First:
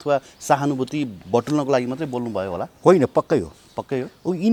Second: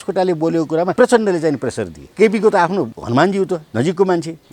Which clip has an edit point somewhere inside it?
second; 4 cuts; at 0.9 s, 2.0 s, 3.0 s, 3.7 s

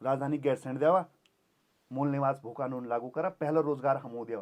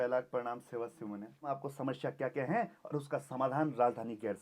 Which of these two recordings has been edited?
second; 1 cut; at 1.6 s

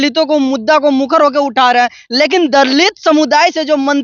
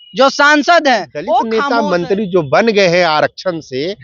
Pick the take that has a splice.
second; 1 cut; at 1.5 s

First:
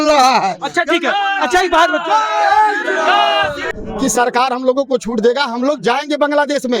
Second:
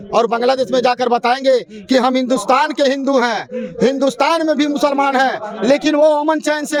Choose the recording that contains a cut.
first; 1 cut; at 3.8 s

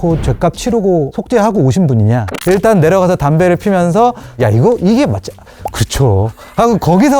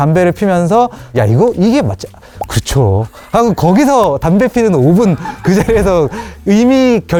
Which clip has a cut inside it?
first; 2 cuts; at 1.2 s, 2.3 s

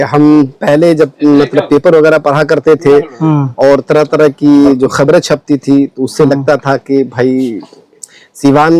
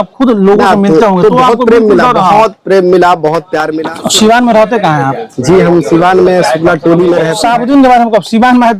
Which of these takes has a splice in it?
second; 2 cuts; at 3.7 s, 7.3 s

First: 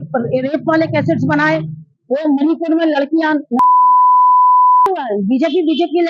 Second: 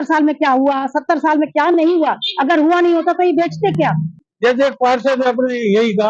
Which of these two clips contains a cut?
second; 1 cut; at 4.1 s

